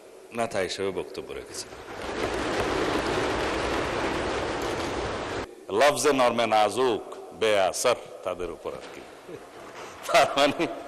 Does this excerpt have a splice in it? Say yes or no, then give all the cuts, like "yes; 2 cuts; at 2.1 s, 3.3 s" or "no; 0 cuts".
yes; 1 cut; at 5.5 s